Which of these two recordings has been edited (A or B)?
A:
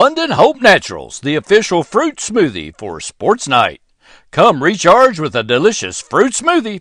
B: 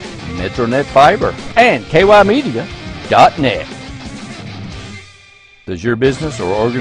B